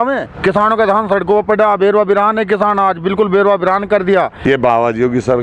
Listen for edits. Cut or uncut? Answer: cut